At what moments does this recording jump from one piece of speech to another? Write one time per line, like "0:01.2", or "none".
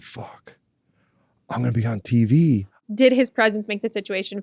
0:02.8